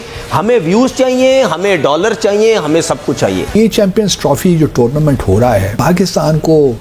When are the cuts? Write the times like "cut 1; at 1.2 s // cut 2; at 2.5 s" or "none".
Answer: cut 1; at 3.5 s // cut 2; at 5.7 s